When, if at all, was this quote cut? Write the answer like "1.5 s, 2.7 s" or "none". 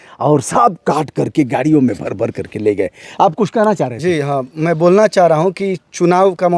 none